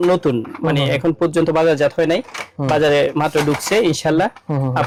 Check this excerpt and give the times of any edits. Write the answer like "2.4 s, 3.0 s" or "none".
none